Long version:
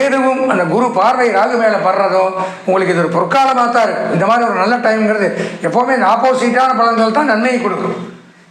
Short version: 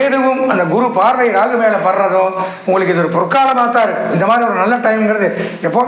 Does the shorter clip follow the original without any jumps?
yes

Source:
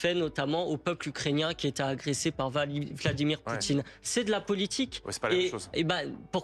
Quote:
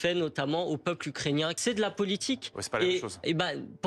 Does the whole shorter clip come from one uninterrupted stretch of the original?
no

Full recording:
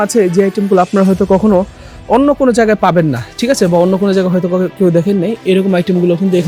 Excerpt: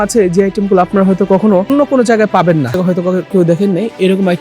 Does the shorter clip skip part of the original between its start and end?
yes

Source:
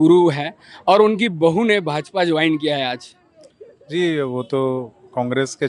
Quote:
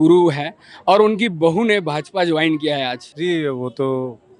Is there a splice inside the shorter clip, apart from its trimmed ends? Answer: yes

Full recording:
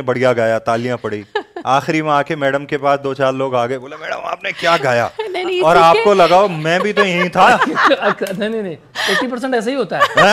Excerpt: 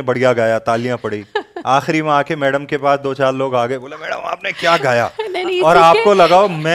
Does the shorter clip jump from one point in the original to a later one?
no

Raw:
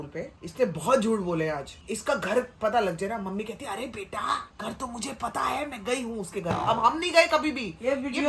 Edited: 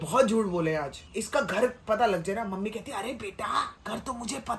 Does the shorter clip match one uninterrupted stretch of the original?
yes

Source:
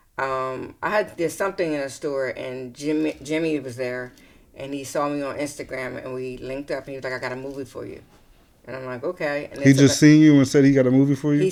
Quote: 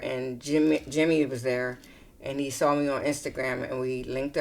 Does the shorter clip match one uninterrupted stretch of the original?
yes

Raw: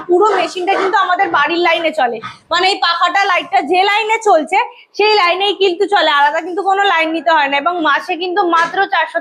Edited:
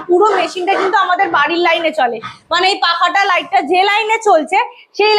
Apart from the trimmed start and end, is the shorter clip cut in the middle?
no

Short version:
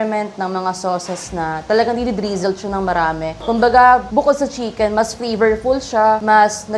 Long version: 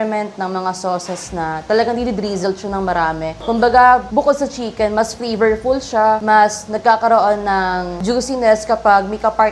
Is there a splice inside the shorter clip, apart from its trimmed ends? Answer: no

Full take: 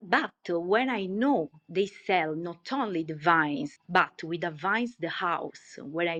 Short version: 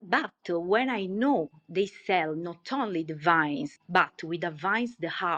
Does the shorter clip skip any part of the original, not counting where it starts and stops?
no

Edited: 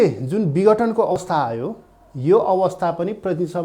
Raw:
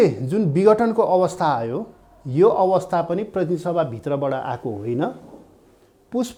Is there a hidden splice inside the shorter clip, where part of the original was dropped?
yes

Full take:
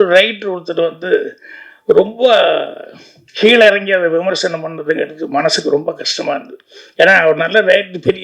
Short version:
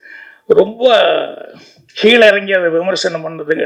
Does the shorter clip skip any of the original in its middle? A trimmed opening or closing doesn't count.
no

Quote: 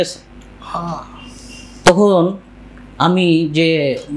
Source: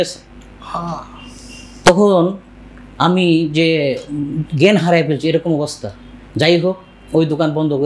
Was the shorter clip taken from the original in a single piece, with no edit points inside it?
yes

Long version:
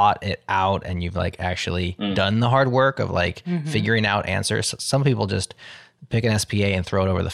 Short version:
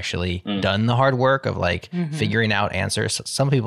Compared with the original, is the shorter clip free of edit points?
yes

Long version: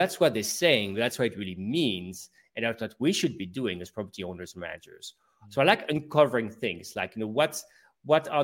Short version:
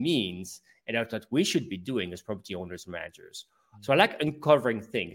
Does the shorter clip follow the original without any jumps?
yes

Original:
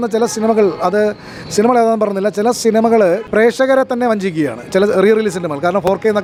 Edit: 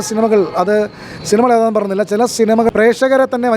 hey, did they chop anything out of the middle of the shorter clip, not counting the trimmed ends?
yes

